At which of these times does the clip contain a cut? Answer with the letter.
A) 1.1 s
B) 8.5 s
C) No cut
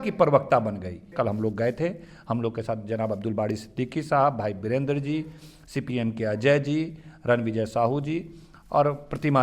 A